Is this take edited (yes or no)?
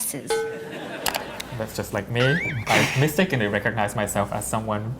yes